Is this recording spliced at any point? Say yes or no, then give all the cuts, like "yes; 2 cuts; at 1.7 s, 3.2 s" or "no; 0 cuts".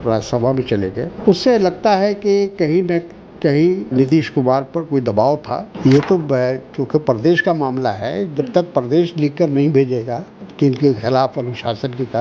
yes; 4 cuts; at 1.1 s, 3.9 s, 5.7 s, 10.4 s